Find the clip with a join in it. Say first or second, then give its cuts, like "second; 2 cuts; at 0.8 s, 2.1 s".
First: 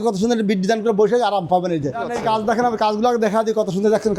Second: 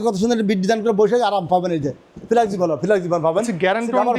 first; 1 cut; at 2.1 s